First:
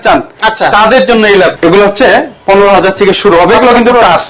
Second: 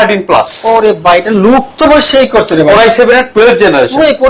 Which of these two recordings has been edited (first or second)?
first